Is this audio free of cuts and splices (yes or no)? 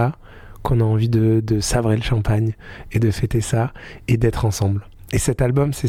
yes